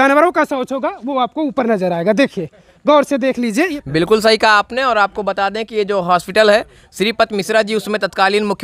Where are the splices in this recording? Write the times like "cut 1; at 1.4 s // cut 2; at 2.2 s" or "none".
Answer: cut 1; at 3.8 s